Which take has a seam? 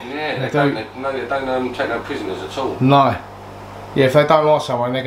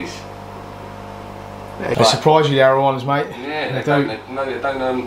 second; 1 cut; at 1.9 s

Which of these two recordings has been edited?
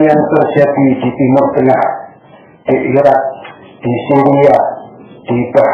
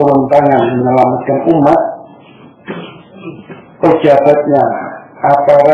second; 1 cut; at 1.3 s

